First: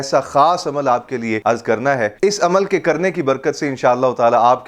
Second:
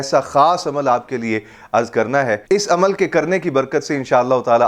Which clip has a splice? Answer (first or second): first